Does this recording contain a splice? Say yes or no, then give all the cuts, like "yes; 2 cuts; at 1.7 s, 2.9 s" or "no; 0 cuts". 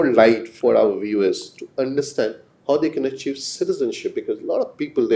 no; 0 cuts